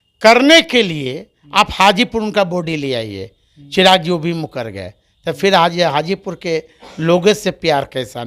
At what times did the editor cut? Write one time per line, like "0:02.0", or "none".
none